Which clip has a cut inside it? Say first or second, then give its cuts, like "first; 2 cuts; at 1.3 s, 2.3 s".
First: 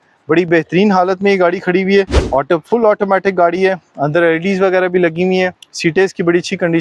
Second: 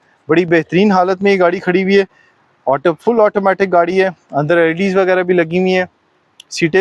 first; 2 cuts; at 2.2 s, 5.6 s